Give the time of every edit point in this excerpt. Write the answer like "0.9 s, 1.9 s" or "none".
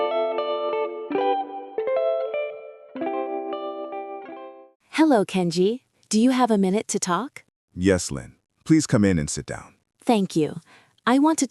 none